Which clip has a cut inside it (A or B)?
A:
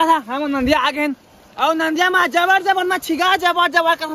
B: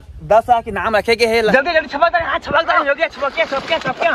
B